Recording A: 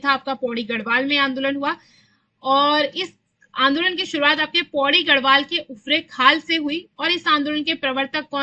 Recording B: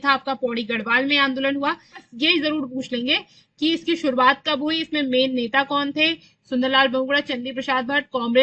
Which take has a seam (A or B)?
B